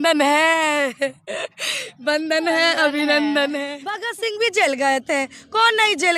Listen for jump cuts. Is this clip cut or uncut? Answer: cut